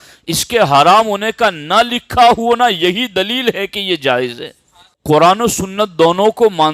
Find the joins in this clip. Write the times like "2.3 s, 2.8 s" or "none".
5.0 s